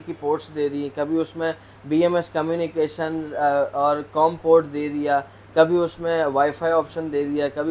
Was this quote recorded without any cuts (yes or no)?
yes